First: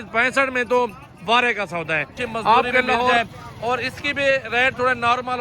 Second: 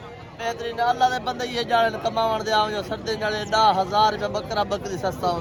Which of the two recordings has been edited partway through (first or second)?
first